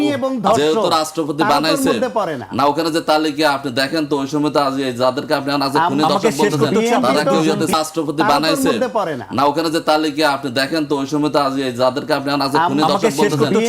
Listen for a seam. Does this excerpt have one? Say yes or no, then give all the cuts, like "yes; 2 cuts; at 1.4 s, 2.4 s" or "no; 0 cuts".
yes; 1 cut; at 7.7 s